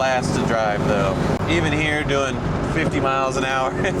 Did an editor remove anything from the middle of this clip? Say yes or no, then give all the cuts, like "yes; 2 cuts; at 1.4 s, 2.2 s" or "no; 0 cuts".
yes; 1 cut; at 1.4 s